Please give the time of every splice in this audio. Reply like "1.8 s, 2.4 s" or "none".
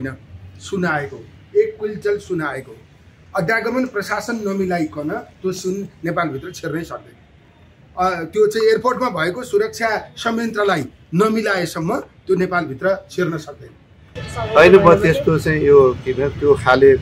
14.1 s